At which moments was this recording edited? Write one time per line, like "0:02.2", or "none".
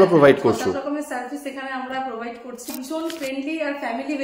0:02.8